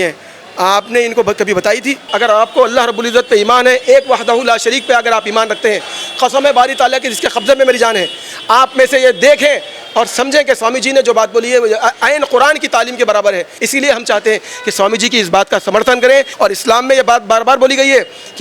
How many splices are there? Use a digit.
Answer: 3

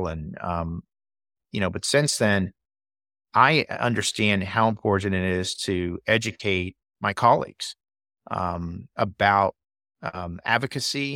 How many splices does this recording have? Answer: 1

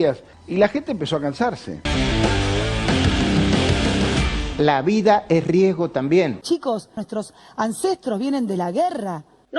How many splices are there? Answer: 2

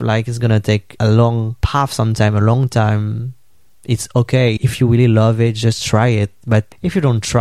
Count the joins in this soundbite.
1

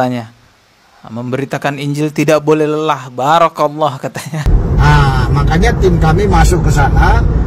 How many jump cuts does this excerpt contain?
1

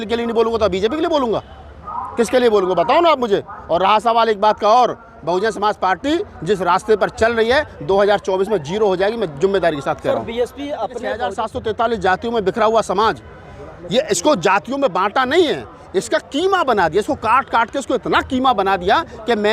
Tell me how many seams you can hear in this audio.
1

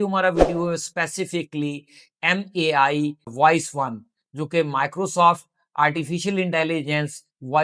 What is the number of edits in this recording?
0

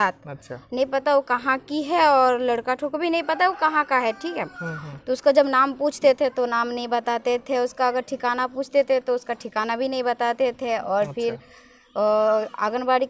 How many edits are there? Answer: 0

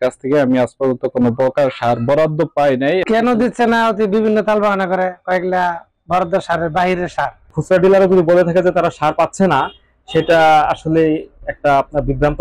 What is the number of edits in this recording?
2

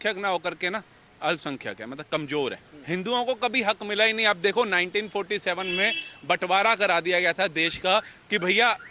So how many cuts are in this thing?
1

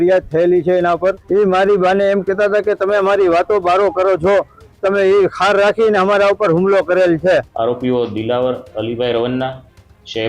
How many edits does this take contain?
2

